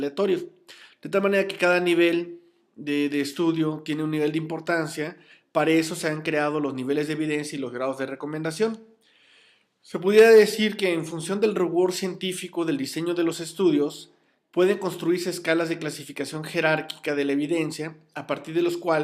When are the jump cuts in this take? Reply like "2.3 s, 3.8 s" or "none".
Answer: none

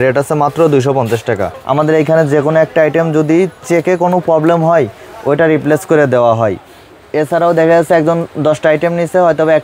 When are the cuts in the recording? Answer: 1.6 s

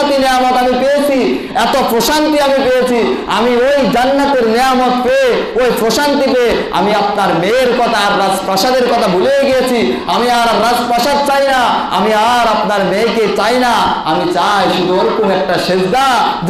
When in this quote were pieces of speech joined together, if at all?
none

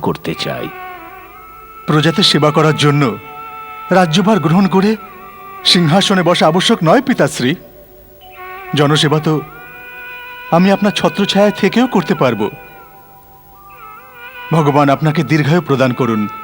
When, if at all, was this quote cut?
none

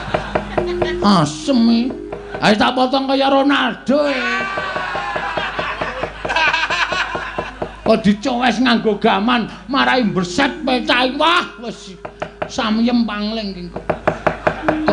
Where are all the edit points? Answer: none

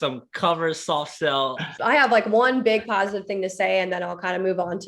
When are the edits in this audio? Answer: 1.7 s

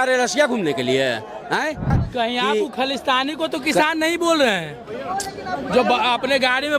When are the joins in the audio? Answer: 2.0 s

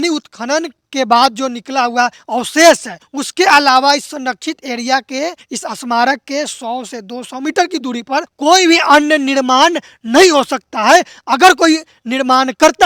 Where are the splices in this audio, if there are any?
none

